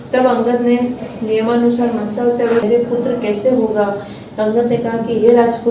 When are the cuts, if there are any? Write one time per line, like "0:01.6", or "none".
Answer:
0:02.6